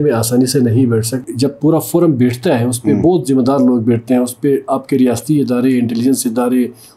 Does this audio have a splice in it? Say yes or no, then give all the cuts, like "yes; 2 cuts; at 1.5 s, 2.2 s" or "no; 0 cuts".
yes; 1 cut; at 1.2 s